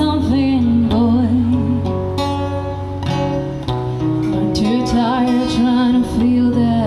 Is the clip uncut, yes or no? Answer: yes